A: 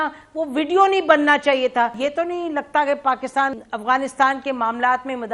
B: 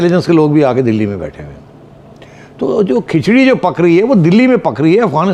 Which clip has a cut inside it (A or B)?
A